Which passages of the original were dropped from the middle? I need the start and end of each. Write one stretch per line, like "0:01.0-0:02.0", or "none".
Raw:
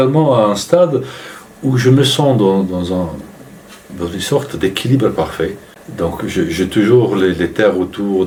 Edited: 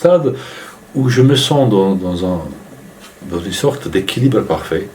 none